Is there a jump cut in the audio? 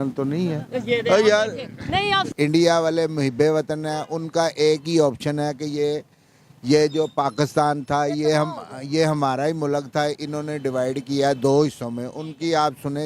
yes; 1 cut; at 2.3 s

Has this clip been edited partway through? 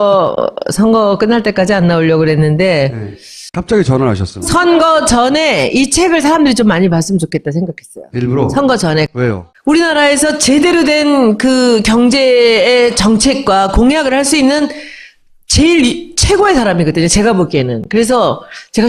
yes; 1 cut; at 10.6 s

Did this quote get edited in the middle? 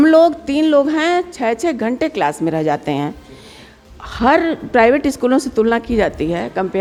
no; 0 cuts

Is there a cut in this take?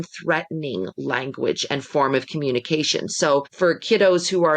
yes; 1 cut; at 3.5 s

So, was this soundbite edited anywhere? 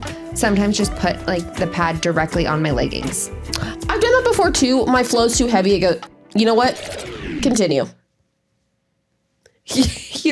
no; 0 cuts

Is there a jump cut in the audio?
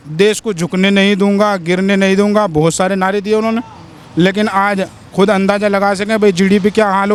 no; 0 cuts

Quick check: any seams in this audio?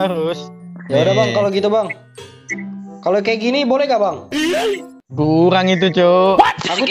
no; 0 cuts

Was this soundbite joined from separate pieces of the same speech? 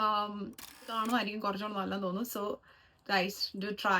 yes; 1 cut; at 0.9 s

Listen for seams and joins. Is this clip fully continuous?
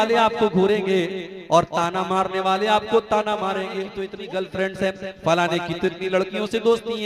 no; 1 cut; at 3.9 s

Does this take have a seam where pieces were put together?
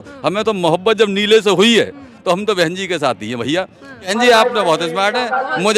yes; 1 cut; at 4.1 s

